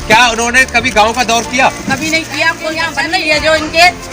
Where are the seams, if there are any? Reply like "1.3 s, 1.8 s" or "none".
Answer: 2.9 s